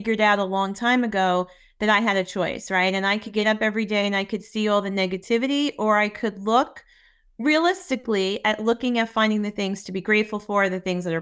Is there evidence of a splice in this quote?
no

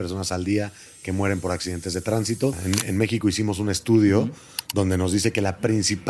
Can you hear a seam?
yes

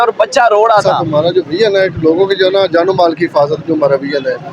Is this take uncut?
no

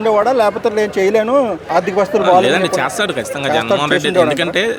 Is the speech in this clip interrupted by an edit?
yes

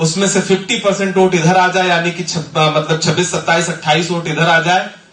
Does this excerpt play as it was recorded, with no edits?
yes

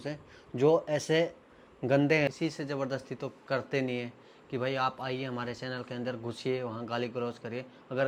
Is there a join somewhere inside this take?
no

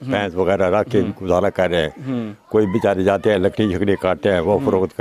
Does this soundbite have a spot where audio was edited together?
no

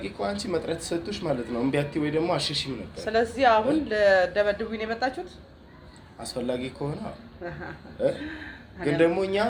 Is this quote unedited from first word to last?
yes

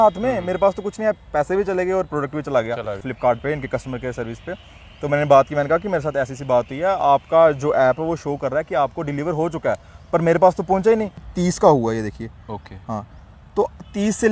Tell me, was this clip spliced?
yes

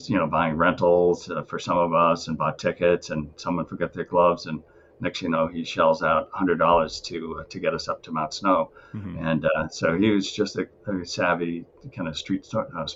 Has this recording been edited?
no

